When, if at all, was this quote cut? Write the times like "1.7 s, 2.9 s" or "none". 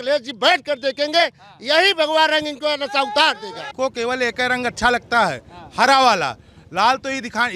3.7 s

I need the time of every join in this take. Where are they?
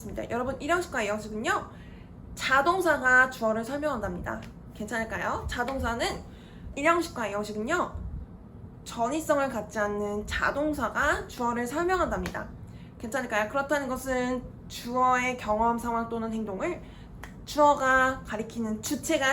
6.7 s

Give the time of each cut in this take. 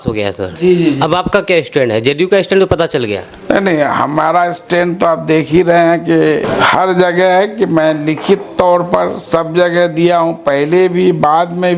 none

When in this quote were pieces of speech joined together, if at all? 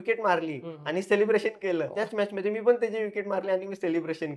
1.9 s

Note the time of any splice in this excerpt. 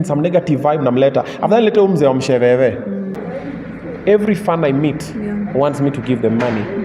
3.3 s

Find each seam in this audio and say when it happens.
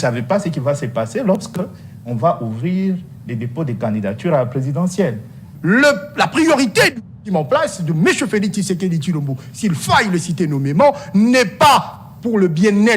5.5 s

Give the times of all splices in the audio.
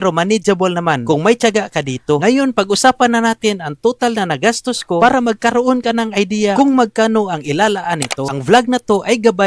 8.3 s

